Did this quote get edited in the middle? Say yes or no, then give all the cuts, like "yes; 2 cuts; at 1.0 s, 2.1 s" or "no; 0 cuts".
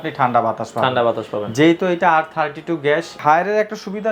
yes; 1 cut; at 3.2 s